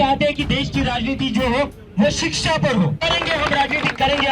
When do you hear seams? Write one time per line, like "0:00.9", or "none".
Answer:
0:03.1